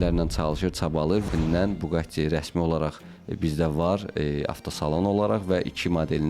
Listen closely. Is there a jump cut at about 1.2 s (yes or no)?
yes